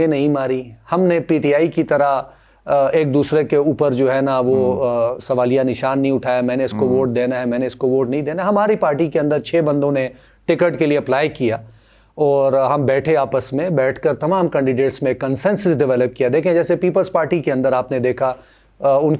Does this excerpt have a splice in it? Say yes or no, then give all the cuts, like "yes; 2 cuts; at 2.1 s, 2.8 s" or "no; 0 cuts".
no; 0 cuts